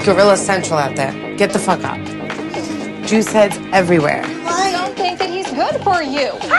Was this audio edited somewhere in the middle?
no; 0 cuts

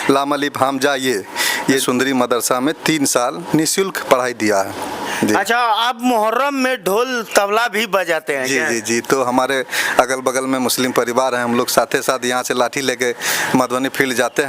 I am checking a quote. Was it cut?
yes; 2 cuts; at 1.8 s, 5.1 s

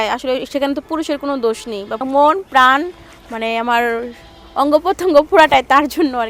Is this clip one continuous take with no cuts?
no; 1 cut; at 2.0 s

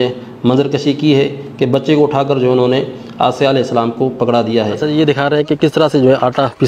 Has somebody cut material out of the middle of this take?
yes; 1 cut; at 4.7 s

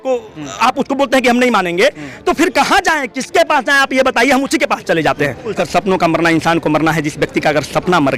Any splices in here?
yes; 1 cut; at 5.5 s

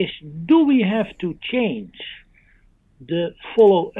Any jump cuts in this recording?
no; 0 cuts

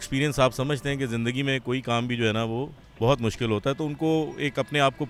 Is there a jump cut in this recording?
no; 0 cuts

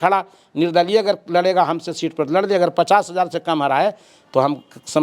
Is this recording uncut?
yes; 0 cuts

